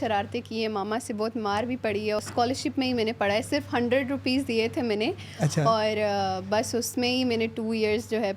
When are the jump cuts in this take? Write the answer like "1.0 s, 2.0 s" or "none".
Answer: 2.2 s